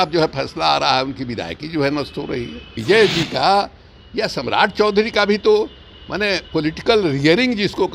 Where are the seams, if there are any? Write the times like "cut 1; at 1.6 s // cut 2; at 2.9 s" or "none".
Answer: cut 1; at 2.7 s